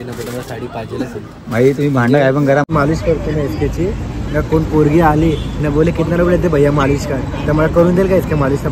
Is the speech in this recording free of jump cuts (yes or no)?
no